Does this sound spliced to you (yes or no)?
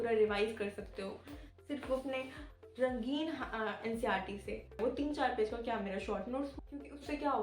yes